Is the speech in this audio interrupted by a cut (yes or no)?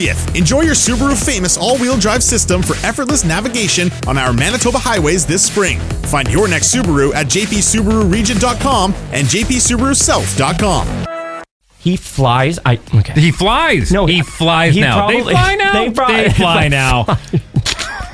yes